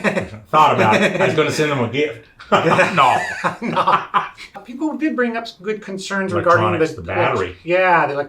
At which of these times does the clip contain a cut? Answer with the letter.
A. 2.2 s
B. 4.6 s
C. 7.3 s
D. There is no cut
B